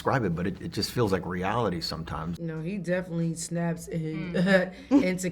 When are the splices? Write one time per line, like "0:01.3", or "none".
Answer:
0:02.2

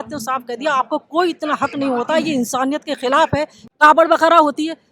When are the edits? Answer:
0:03.6

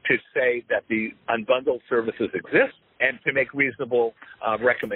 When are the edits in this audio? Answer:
0:01.1
0:02.8

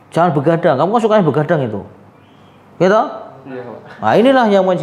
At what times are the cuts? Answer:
none

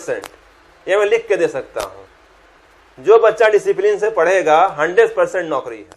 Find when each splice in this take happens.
none

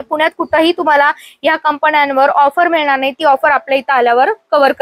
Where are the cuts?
none

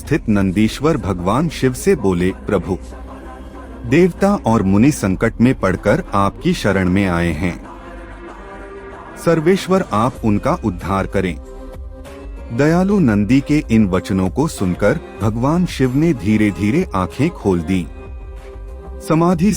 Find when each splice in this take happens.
0:07.6
0:09.2

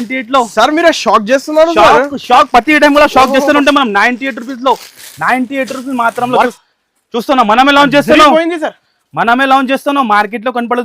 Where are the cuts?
0:06.5

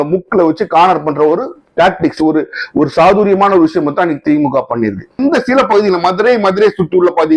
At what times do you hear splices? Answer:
0:05.2

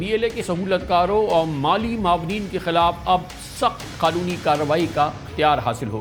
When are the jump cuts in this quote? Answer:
none

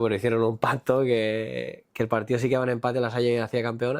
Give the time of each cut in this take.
none

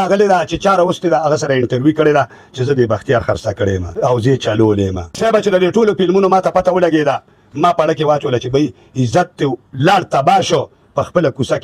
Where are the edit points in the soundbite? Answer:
0:03.9
0:05.1

